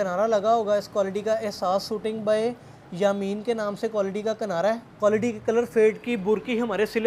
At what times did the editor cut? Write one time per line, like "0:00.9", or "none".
0:04.9